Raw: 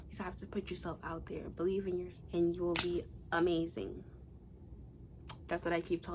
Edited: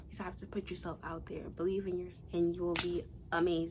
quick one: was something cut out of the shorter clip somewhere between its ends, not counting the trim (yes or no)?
no